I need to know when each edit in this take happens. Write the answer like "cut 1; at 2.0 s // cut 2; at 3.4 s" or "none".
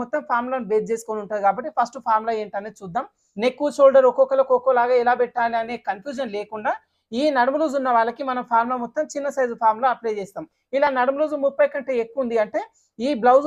cut 1; at 3.2 s // cut 2; at 6.9 s // cut 3; at 10.5 s